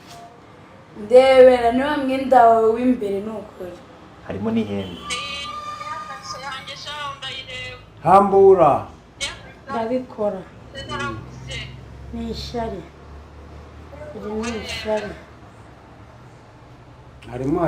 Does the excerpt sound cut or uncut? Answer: uncut